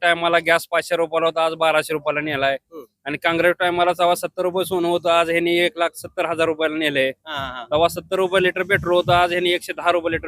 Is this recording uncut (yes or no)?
yes